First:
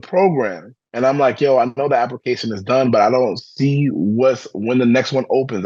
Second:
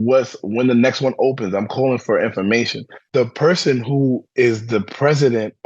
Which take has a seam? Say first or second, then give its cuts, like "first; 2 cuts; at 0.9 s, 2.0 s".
second; 1 cut; at 3.0 s